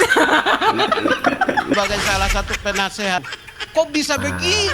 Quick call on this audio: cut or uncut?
cut